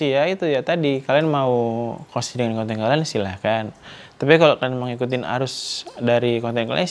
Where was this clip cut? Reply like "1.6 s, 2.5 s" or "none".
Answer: none